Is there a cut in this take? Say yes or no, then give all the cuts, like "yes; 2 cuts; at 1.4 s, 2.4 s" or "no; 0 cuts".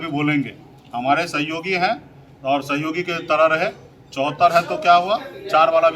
no; 0 cuts